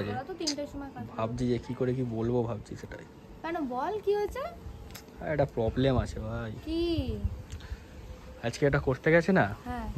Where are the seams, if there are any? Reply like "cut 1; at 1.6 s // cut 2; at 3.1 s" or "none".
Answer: none